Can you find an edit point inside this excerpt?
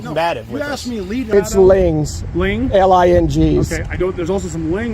yes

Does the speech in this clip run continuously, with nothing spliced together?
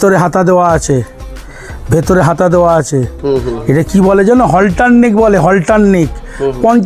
yes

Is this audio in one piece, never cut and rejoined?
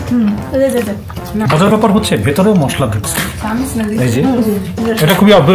no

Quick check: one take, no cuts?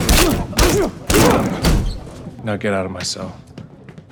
yes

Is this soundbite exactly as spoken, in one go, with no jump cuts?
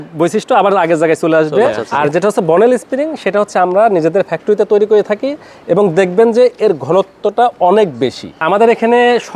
no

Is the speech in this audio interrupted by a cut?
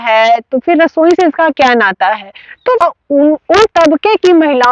yes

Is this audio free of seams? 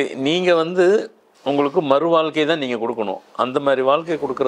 yes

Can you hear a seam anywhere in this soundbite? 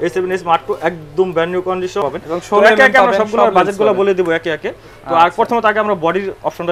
yes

